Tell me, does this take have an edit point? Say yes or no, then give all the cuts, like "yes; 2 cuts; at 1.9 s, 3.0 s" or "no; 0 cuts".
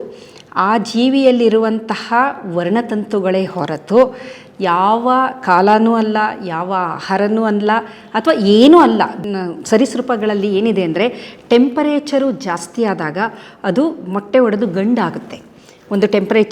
yes; 1 cut; at 9.2 s